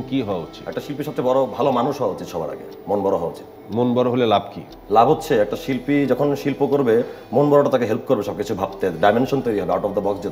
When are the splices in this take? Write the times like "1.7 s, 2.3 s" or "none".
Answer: none